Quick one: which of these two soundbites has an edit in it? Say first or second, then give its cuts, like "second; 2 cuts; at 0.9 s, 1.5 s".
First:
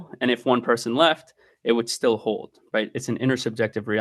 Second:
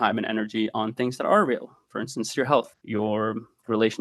second; 1 cut; at 2.8 s